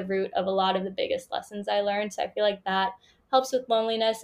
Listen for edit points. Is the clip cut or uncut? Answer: uncut